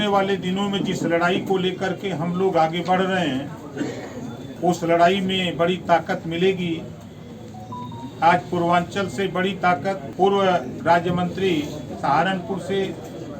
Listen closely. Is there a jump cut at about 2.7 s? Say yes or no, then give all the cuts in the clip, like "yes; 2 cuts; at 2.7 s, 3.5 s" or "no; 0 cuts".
no; 2 cuts; at 4.5 s, 10.1 s